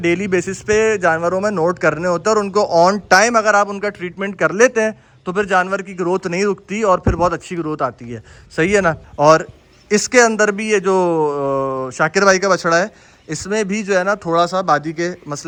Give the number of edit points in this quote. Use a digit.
0